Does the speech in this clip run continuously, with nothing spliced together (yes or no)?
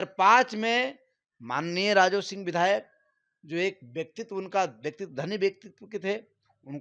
yes